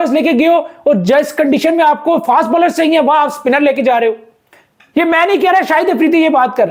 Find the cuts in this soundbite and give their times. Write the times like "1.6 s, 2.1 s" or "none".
none